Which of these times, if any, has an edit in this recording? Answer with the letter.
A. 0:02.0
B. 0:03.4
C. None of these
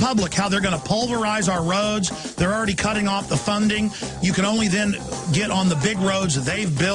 B